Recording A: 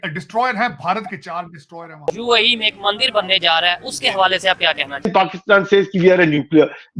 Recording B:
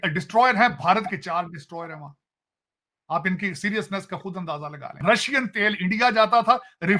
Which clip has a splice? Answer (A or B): A